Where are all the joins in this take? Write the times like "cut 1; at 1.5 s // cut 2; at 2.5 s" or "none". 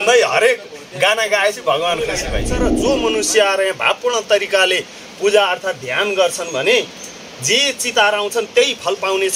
cut 1; at 2.7 s